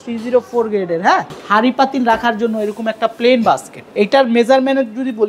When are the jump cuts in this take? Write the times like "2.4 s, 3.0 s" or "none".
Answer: 1.3 s, 3.8 s